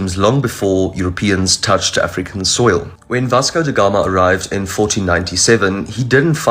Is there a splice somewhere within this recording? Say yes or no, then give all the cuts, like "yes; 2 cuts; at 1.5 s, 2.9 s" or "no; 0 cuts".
no; 0 cuts